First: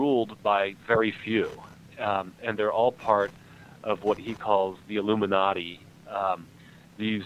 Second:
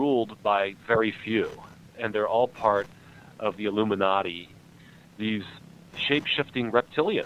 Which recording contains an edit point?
second; 4 cuts; at 1.9 s, 3.6 s, 4.7 s, 5.9 s

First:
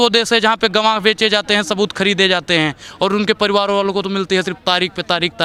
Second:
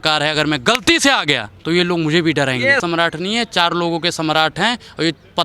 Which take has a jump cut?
second; 2 cuts; at 1.5 s, 2.8 s

